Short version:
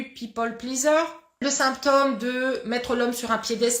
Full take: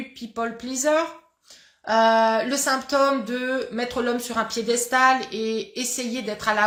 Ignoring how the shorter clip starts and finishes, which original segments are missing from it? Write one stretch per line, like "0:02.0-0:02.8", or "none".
0:01.5-0:02.5